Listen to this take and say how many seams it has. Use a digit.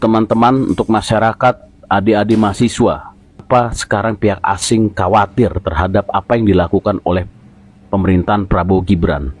1